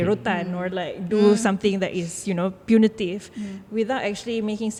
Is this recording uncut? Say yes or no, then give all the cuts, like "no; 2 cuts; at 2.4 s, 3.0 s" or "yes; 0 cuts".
yes; 0 cuts